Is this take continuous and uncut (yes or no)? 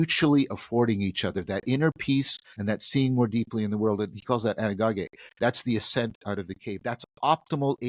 no